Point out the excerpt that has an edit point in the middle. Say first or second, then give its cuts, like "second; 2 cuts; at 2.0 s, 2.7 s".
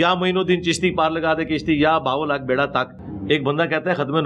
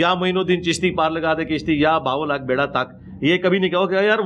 first; 1 cut; at 3.0 s